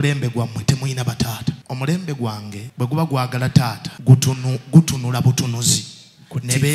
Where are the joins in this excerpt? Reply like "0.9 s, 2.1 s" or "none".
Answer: 1.7 s, 2.6 s, 3.9 s

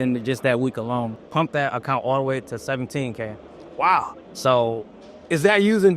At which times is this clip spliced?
1.2 s

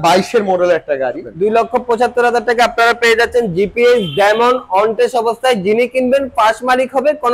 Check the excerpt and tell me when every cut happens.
1.3 s

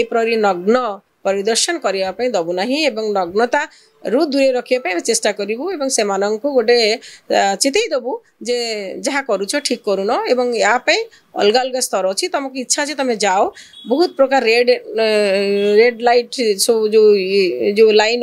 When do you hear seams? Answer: none

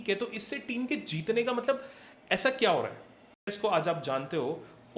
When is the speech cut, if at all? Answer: 3.5 s

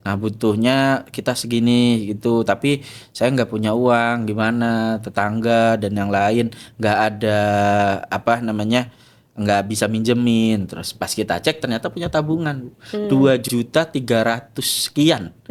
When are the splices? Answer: none

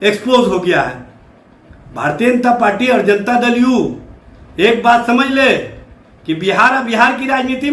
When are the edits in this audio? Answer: none

